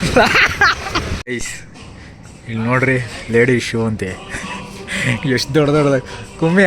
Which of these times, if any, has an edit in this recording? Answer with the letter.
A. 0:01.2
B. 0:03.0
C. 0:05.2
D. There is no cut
A